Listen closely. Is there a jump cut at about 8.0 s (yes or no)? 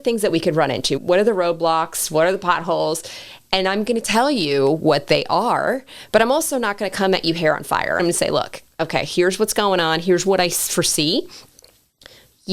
yes